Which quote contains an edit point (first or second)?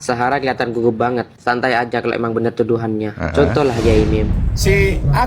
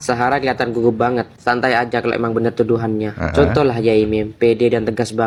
first